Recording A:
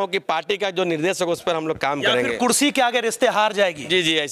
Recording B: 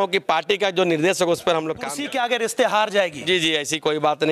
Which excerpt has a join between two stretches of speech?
B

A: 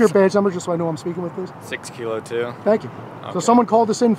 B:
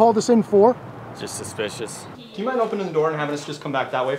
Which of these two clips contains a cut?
B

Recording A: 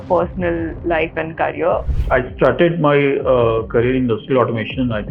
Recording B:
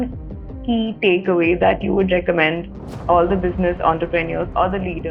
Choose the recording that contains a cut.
A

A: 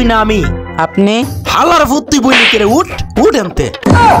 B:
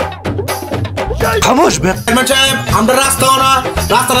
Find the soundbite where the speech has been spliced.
B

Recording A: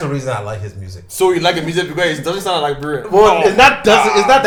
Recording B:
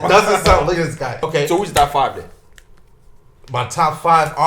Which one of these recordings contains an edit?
B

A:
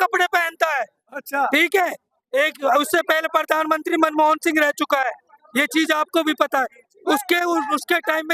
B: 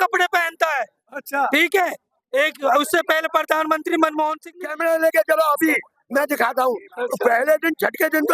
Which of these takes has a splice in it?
B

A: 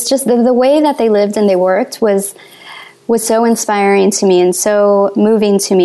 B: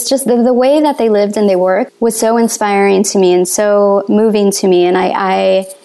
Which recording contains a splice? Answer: B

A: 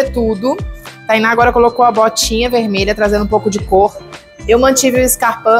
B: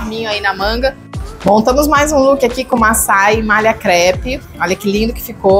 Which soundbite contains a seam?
B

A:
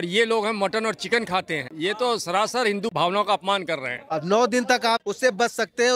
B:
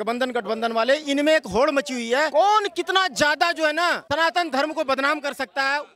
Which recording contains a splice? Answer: A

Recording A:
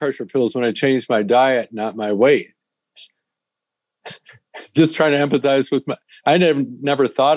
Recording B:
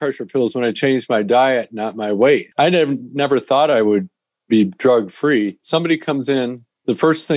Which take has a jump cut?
B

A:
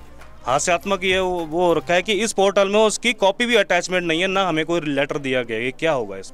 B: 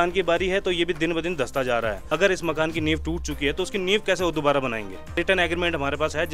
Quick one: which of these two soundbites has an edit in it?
B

